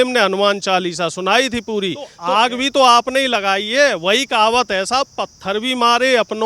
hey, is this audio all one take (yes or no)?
no